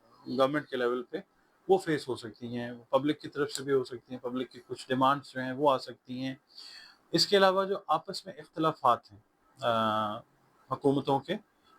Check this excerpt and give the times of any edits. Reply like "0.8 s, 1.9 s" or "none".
none